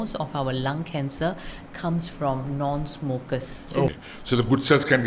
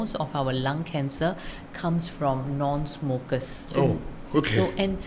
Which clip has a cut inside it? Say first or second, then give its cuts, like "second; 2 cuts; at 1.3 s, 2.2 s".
first; 1 cut; at 3.9 s